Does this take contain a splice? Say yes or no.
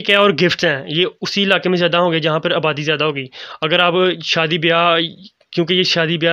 no